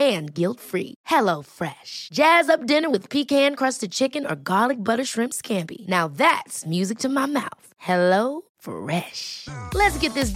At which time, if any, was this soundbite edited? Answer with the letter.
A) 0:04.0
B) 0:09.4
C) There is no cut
C